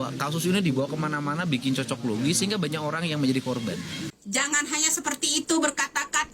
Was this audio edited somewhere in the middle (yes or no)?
yes